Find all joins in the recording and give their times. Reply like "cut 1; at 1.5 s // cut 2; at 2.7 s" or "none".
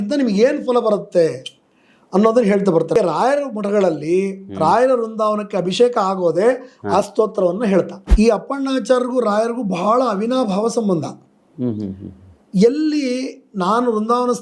cut 1; at 2.9 s // cut 2; at 8.0 s